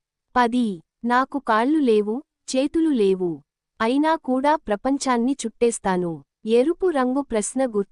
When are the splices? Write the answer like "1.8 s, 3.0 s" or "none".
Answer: none